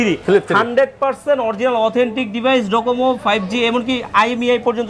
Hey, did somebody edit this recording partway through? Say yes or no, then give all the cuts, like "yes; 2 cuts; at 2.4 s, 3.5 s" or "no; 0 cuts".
no; 0 cuts